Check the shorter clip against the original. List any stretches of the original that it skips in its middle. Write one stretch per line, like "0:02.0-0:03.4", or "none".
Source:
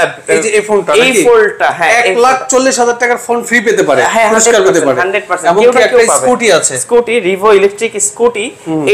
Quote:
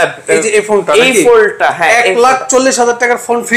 none